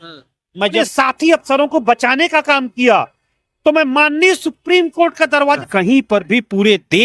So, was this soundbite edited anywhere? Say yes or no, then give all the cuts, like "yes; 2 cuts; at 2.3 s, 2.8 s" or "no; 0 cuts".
yes; 2 cuts; at 0.9 s, 5.6 s